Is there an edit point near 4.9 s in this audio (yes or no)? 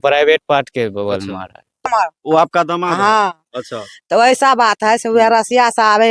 no